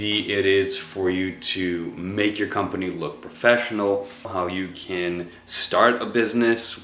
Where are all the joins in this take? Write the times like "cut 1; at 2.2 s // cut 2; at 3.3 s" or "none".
cut 1; at 4.2 s

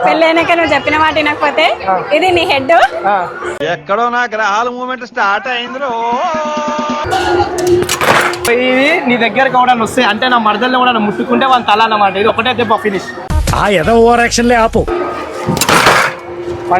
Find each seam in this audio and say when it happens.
cut 1; at 7.0 s // cut 2; at 8.5 s // cut 3; at 14.9 s

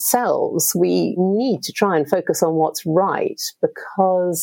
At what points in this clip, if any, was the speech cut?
none

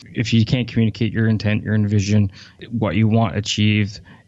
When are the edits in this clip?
cut 1; at 2.6 s

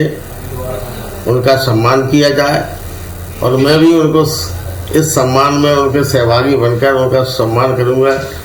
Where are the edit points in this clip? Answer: none

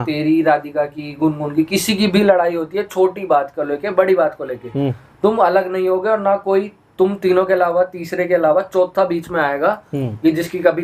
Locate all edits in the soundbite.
none

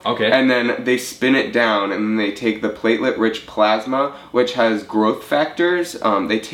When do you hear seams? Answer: none

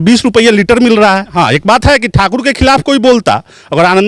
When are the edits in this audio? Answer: cut 1; at 1.3 s

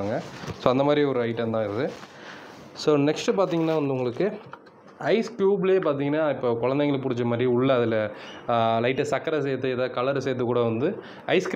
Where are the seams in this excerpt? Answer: none

